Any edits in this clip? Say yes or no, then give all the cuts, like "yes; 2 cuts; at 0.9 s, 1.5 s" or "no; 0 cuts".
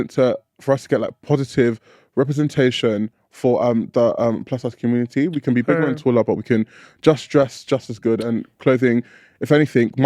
no; 0 cuts